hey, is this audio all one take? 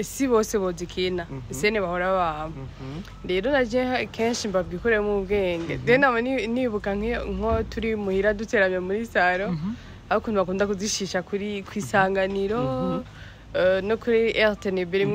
yes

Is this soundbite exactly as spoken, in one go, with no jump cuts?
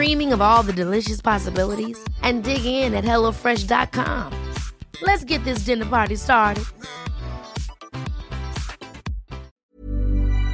no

